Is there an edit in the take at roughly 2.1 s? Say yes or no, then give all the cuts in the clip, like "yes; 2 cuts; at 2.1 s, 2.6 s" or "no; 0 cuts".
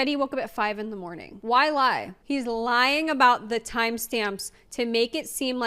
yes; 1 cut; at 2.1 s